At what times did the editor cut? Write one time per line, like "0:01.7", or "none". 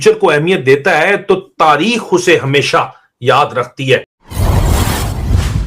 0:04.2